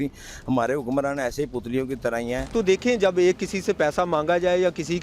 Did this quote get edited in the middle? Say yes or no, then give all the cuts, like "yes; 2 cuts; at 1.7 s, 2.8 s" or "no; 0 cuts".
yes; 1 cut; at 2.4 s